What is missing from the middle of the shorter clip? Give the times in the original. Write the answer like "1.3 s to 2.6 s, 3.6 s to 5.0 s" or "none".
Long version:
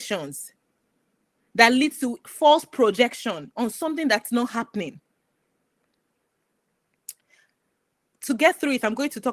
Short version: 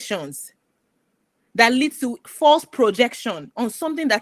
none